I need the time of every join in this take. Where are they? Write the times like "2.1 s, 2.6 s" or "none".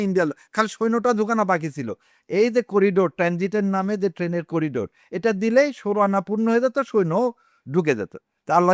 none